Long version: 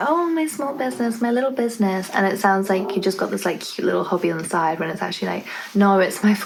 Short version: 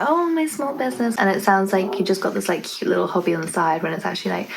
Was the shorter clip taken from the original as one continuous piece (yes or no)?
no